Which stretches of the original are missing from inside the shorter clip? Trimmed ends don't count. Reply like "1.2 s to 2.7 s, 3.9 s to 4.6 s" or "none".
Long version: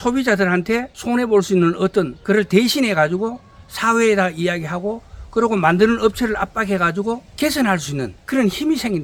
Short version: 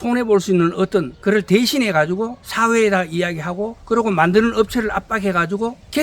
3.4 s to 3.7 s, 5.0 s to 5.2 s

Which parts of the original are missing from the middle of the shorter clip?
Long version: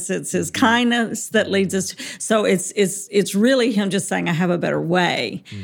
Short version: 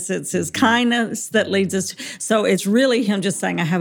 2.6 s to 3.3 s

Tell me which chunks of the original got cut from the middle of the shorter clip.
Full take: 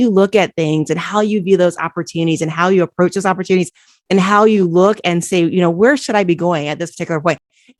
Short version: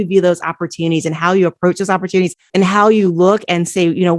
3.8 s to 4.0 s

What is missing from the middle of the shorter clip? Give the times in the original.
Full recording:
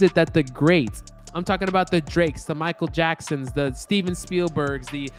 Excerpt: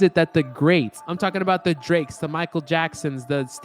1.0 s to 1.3 s

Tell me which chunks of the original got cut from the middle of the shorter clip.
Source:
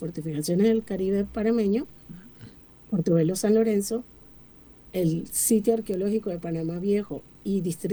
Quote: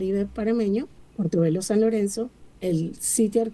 2.0 s to 2.7 s, 4.2 s to 4.8 s

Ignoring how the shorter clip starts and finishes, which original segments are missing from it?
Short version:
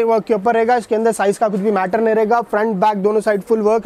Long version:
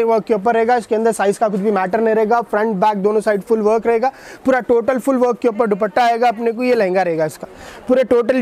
none

